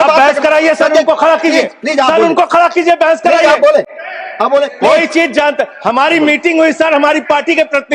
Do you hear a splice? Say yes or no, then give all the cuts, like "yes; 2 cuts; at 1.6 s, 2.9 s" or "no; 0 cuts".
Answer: no; 0 cuts